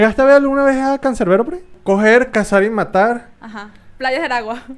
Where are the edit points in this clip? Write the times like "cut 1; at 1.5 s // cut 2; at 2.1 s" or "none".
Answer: cut 1; at 1.7 s